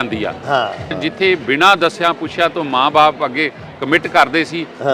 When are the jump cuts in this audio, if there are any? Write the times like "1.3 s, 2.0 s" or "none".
1.0 s